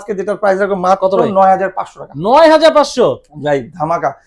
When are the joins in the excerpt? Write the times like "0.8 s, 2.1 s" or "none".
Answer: none